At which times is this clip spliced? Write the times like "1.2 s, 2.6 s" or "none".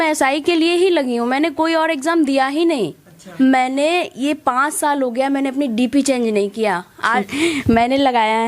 3.2 s, 7.3 s